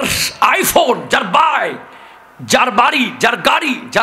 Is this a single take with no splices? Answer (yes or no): yes